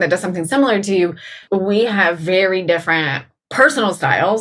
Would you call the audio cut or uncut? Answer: cut